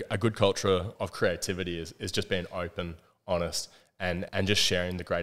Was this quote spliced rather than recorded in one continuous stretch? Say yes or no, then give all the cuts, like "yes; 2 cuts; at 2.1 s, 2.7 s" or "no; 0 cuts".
yes; 2 cuts; at 0.9 s, 4.3 s